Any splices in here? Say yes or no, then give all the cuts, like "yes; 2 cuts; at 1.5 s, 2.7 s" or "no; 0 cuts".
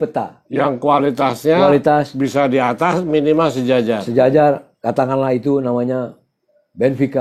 no; 0 cuts